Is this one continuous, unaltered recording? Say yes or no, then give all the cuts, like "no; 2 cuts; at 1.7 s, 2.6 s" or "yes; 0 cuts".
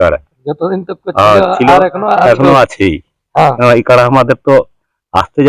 no; 1 cut; at 3.4 s